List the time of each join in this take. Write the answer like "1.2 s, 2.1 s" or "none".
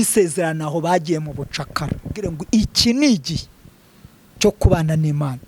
2.4 s